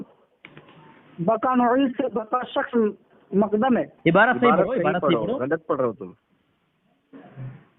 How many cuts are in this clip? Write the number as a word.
one